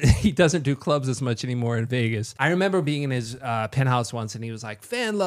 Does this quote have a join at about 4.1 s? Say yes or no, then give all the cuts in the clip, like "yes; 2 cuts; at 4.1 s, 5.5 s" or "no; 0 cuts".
no; 1 cut; at 2.3 s